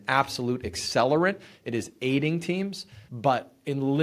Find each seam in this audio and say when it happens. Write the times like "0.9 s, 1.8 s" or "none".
none